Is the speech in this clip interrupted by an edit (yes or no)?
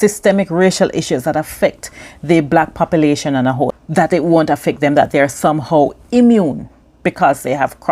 yes